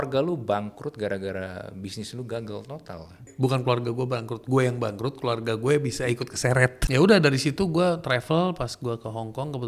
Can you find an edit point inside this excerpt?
yes; 2 cuts; at 3.3 s, 6.8 s

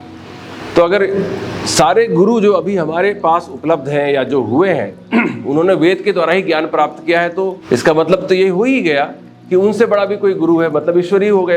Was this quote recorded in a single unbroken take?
no; 1 cut; at 7.6 s

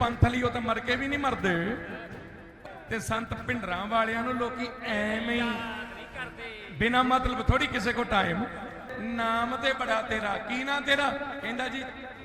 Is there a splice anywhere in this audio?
yes; 2 cuts; at 2.5 s, 8.9 s

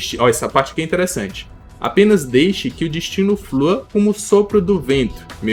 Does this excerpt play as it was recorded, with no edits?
yes; 0 cuts

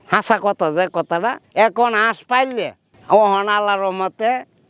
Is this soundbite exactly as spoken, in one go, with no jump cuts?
yes; 0 cuts

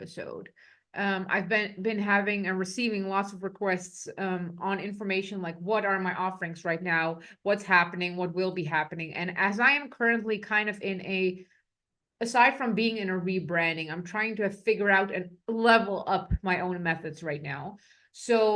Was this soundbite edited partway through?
no; 0 cuts

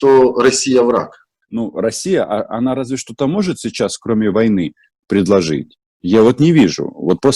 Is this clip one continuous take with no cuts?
no; 1 cut; at 1.4 s

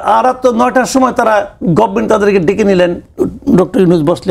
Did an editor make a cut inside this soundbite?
no; 0 cuts

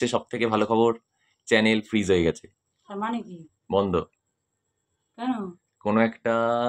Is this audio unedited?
yes; 0 cuts

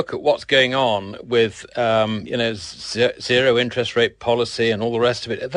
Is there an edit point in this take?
yes; 1 cut; at 2.4 s

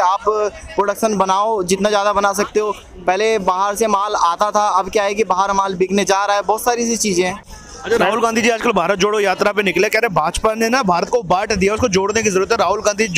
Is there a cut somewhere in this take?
yes; 1 cut; at 7.4 s

